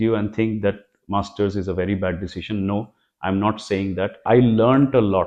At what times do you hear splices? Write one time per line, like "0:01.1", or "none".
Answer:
0:04.2